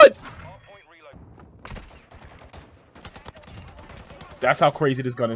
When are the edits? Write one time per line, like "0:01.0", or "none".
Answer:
0:01.1